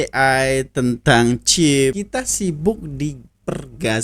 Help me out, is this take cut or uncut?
cut